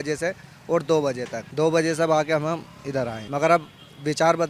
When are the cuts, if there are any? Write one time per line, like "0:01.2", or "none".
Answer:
0:01.4
0:03.2